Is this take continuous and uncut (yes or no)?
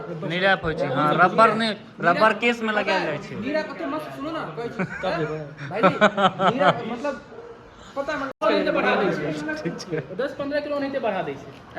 no